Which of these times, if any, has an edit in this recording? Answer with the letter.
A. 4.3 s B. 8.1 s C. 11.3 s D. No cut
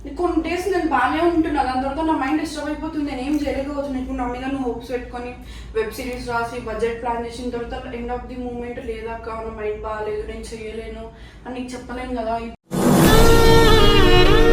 D